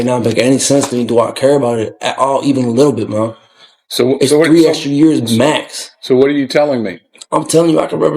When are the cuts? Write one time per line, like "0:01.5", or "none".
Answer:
none